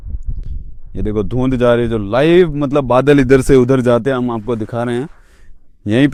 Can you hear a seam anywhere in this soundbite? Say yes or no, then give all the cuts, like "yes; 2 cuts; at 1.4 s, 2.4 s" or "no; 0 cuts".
no; 0 cuts